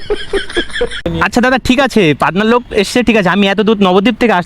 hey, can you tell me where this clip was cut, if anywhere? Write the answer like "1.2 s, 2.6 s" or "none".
1.1 s